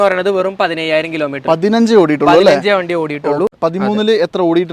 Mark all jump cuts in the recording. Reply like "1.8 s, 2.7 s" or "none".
3.5 s

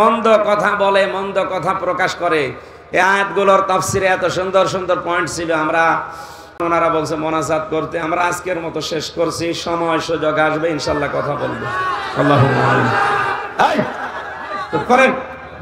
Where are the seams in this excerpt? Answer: 6.6 s

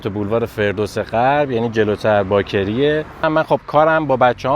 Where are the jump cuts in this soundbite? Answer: 3.3 s

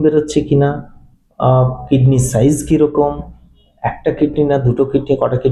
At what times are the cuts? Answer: none

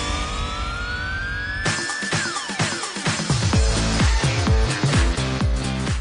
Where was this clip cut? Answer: none

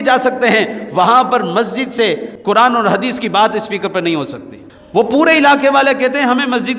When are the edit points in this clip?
2.3 s, 4.8 s

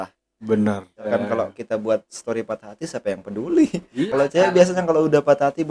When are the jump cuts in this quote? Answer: 1.1 s, 4.0 s

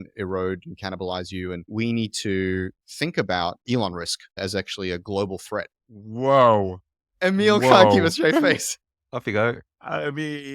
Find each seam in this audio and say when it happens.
1.7 s

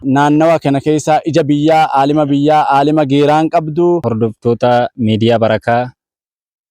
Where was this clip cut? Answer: 4.1 s

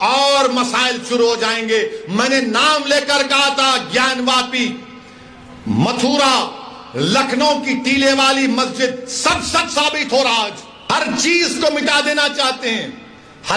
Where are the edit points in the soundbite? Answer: 10.7 s

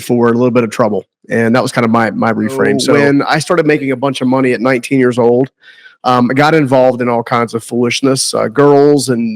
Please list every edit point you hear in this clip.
2.8 s

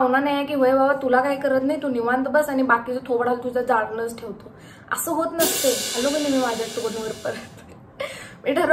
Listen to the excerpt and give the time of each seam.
5.9 s

